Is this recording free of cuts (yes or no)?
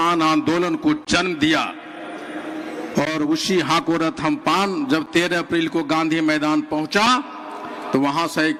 yes